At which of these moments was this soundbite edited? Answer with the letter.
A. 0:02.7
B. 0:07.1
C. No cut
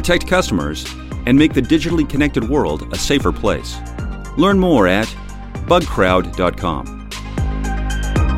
B